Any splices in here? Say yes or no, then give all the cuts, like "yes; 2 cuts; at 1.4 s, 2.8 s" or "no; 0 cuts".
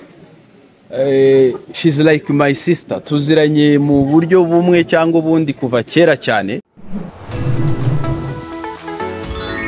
yes; 1 cut; at 6.8 s